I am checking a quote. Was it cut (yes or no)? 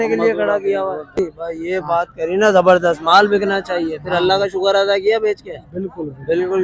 yes